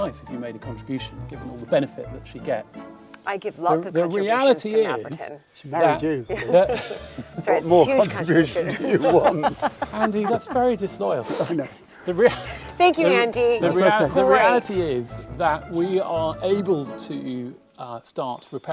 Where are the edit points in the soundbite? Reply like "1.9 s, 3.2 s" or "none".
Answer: none